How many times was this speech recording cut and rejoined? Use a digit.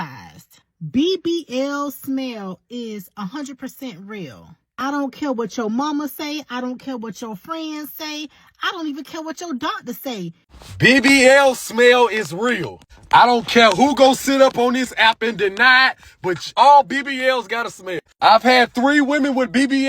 2